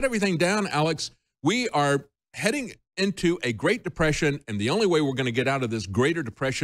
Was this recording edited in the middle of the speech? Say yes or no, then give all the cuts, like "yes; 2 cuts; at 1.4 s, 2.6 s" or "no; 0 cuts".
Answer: no; 0 cuts